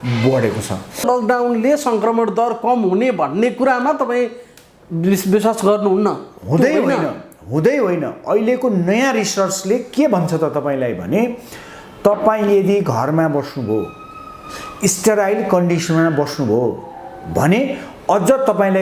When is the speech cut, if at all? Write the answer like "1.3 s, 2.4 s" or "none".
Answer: 1.0 s